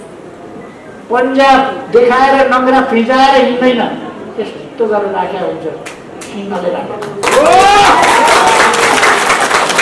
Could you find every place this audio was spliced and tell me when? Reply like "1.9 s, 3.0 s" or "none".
1.0 s